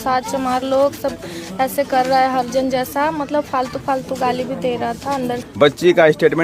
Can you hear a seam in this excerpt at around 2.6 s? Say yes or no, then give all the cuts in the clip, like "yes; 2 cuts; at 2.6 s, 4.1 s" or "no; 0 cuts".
no; 1 cut; at 5.4 s